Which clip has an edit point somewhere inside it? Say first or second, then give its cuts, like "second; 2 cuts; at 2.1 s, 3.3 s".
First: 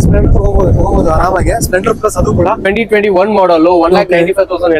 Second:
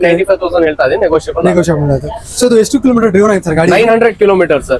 first; 1 cut; at 2.6 s